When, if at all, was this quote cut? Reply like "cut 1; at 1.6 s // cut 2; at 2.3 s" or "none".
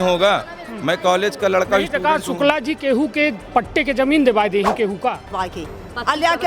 cut 1; at 5.4 s